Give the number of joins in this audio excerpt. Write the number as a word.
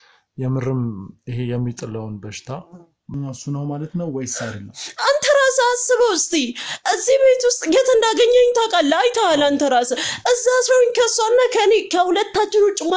one